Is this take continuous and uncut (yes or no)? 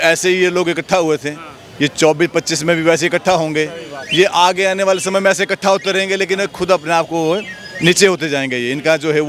yes